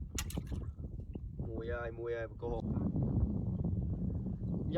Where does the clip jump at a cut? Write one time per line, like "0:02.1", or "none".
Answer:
0:02.6